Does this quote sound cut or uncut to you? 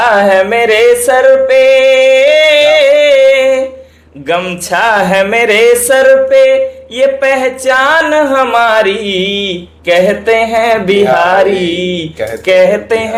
uncut